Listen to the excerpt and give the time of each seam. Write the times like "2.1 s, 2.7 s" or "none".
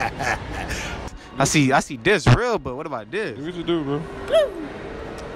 1.2 s